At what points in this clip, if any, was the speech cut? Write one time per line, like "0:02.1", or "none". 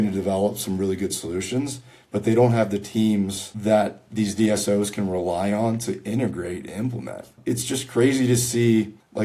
0:07.2